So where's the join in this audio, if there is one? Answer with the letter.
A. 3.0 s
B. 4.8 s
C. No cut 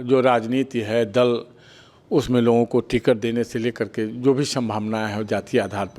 C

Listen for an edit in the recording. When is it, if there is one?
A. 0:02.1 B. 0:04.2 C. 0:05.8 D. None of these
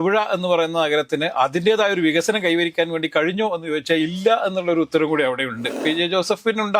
C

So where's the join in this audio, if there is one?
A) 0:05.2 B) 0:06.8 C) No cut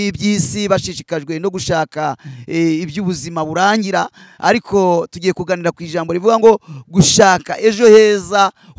C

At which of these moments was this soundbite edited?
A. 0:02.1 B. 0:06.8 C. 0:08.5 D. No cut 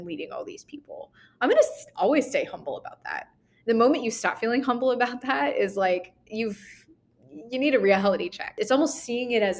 C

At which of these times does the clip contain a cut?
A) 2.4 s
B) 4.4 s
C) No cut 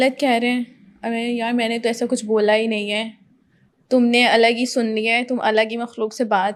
C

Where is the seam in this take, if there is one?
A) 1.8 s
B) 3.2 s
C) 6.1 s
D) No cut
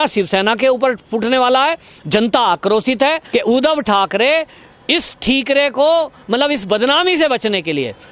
B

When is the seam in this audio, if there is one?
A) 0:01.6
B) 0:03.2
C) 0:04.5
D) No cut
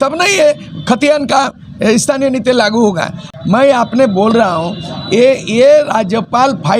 B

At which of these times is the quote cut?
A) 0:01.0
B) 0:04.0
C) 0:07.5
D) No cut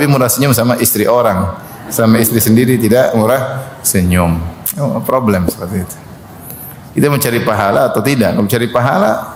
D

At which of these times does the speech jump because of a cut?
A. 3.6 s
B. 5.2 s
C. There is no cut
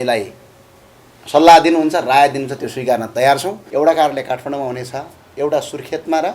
A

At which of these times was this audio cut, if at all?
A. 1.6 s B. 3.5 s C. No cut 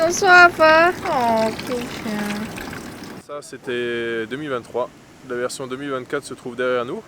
B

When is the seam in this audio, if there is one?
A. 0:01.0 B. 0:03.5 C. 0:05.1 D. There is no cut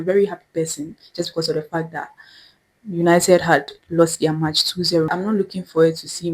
C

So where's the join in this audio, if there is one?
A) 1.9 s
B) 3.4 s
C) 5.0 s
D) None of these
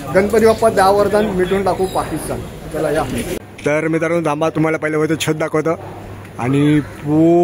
B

